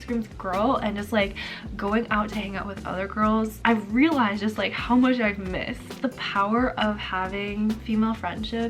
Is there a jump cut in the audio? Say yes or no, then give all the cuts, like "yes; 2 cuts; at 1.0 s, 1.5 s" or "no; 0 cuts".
yes; 2 cuts; at 3.6 s, 5.9 s